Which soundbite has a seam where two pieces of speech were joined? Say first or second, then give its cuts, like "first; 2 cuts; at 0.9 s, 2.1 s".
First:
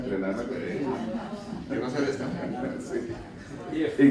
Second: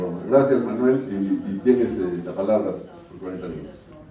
first; 1 cut; at 2.8 s